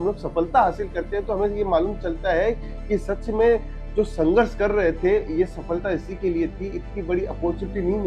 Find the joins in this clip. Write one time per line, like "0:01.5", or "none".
none